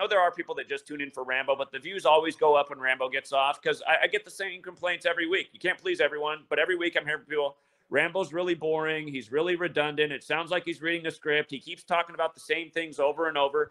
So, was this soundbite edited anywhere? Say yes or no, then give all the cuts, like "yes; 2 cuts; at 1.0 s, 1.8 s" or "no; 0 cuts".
no; 0 cuts